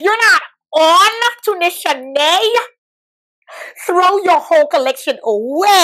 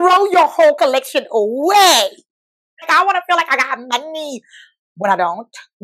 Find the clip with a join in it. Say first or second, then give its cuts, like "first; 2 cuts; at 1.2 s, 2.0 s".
second; 1 cut; at 2.9 s